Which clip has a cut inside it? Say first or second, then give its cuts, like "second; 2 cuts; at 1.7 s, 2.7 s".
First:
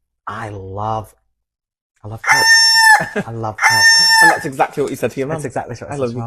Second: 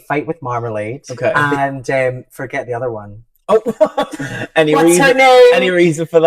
second; 1 cut; at 1.4 s